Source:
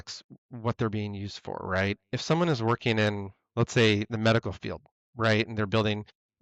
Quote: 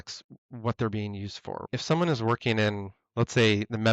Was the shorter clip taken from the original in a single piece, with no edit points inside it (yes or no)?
no